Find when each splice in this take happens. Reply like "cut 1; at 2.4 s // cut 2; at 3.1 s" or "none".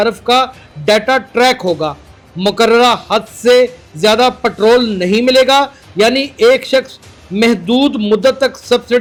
none